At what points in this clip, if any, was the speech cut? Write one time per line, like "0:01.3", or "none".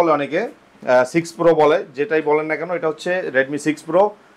none